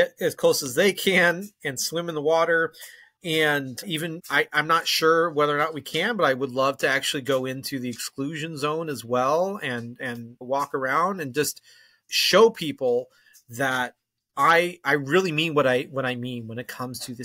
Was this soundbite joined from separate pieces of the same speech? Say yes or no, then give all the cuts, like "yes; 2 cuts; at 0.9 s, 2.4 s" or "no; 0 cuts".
no; 0 cuts